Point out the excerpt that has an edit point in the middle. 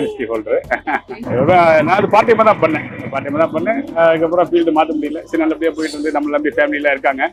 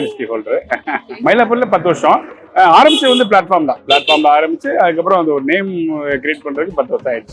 second; 1 cut; at 1.1 s

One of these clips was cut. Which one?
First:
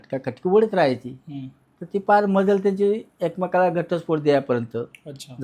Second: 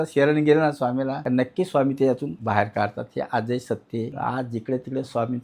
second; 3 cuts; at 1.2 s, 2.3 s, 4.1 s

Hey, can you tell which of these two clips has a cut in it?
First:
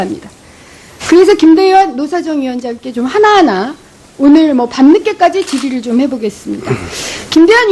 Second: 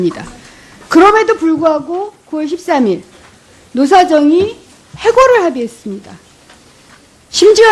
first; 1 cut; at 6.5 s

